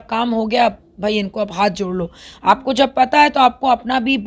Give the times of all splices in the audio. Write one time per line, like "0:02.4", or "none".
none